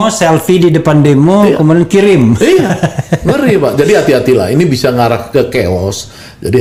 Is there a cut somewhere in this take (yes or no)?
no